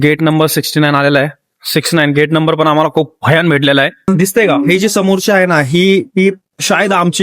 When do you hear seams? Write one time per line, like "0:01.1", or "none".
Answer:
0:04.1